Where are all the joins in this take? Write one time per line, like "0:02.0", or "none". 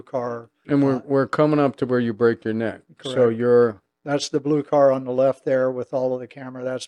none